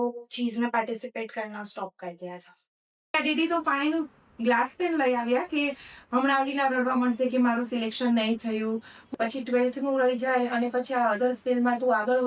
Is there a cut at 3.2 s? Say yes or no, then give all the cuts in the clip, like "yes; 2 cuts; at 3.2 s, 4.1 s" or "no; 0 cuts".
yes; 2 cuts; at 3.2 s, 9.0 s